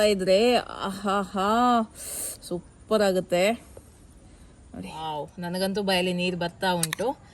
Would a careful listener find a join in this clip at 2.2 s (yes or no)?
no